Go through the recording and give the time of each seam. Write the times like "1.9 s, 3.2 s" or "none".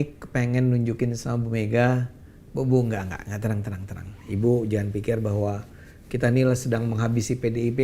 1.2 s